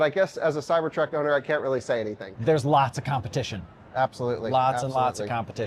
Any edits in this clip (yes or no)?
yes